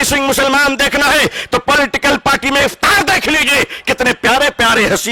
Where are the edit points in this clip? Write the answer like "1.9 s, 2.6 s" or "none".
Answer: none